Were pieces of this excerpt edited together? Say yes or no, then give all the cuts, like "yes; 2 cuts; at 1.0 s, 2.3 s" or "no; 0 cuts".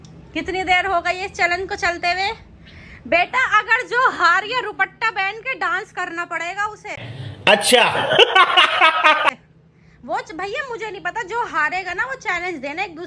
no; 0 cuts